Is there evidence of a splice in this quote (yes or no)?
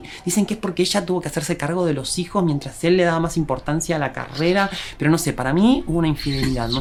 no